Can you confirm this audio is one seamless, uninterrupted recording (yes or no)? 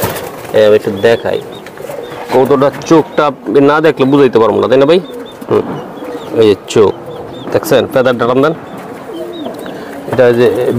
yes